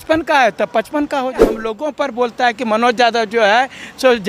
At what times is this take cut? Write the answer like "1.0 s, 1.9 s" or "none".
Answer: 1.4 s

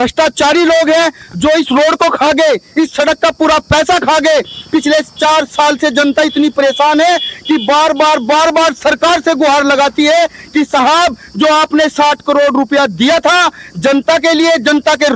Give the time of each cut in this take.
none

